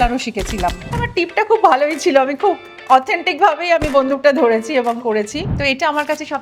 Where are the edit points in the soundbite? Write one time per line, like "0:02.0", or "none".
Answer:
0:00.9
0:05.4